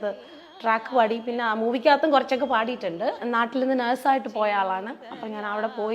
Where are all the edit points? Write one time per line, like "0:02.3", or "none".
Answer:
0:03.2